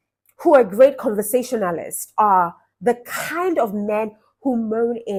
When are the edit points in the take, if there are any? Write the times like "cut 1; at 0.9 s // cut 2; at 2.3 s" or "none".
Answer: none